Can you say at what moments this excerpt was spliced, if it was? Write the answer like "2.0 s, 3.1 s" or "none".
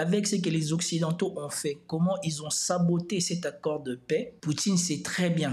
4.3 s